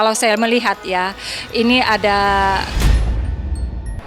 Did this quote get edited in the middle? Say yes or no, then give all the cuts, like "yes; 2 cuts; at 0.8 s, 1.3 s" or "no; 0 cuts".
yes; 1 cut; at 2.7 s